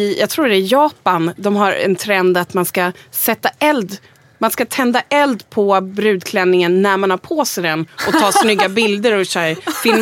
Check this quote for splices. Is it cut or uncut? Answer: uncut